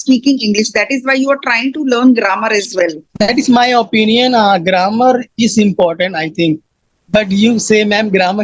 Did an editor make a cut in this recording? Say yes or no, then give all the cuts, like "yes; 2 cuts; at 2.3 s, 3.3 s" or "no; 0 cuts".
yes; 1 cut; at 3.0 s